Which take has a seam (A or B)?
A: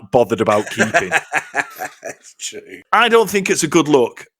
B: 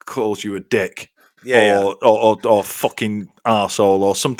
A